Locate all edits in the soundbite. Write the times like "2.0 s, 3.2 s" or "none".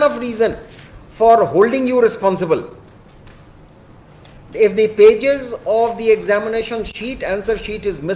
none